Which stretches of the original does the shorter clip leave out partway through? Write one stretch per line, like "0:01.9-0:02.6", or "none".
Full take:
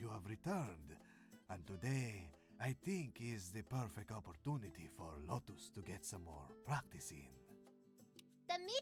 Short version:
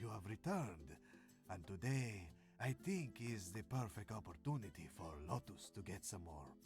none